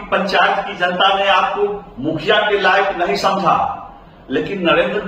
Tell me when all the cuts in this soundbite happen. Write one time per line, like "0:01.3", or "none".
none